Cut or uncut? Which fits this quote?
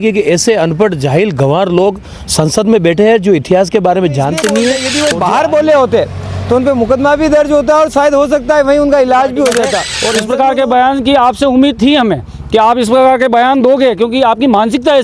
cut